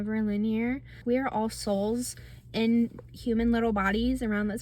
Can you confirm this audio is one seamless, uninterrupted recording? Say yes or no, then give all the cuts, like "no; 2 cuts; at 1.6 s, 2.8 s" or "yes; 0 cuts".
no; 1 cut; at 1.0 s